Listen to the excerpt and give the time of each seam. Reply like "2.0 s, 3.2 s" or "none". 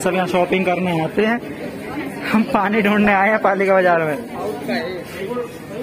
none